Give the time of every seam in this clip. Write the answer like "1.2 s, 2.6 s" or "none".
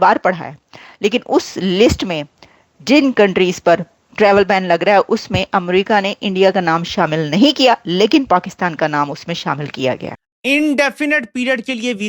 10.3 s